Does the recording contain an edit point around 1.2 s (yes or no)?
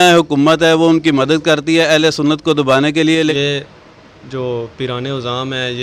no